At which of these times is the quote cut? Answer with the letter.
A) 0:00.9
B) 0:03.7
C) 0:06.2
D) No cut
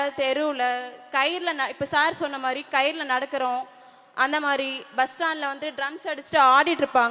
D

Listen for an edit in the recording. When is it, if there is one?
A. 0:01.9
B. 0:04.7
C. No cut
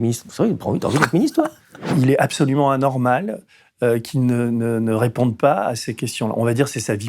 A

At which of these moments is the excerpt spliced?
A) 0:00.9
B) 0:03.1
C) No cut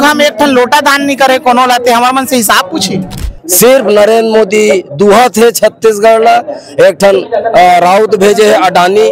B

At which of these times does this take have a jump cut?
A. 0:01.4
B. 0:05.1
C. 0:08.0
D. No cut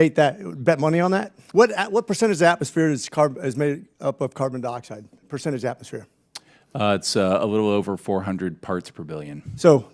A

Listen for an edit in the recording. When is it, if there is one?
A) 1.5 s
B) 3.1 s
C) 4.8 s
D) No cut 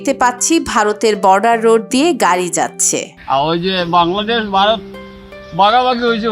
B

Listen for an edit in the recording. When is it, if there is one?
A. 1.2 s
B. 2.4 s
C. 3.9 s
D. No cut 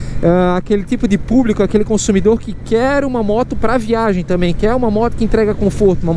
D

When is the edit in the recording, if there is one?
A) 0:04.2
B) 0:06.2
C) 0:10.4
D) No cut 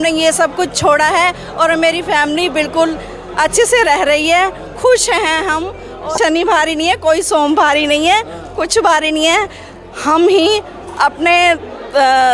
B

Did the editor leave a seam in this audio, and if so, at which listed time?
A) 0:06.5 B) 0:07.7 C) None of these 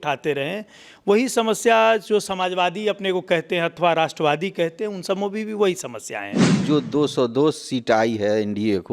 A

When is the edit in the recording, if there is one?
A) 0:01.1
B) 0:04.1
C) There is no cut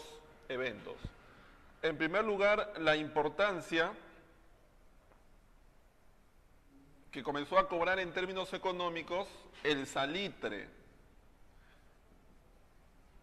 B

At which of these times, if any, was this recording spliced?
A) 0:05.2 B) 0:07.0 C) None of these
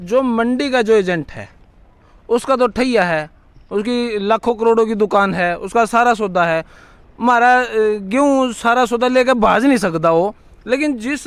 C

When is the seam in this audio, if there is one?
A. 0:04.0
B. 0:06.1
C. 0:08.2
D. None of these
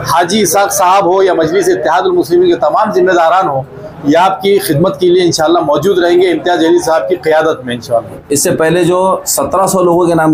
C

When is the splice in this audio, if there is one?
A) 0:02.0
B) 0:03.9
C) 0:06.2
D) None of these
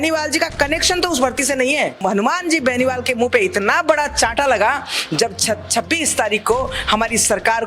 A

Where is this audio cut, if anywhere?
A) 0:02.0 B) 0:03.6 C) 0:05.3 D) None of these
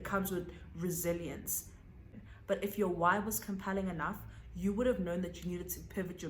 A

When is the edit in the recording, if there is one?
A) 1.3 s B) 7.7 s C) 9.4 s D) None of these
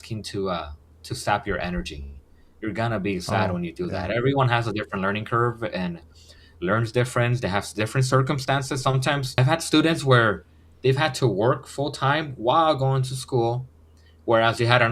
C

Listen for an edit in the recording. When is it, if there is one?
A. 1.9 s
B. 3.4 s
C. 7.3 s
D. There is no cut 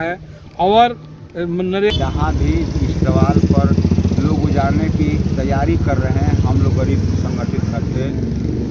A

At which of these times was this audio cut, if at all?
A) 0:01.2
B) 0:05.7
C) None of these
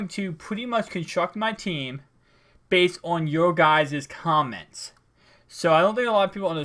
A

